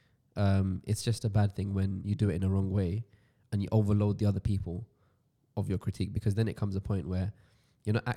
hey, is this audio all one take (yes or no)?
yes